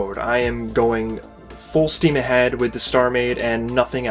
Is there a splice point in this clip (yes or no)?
yes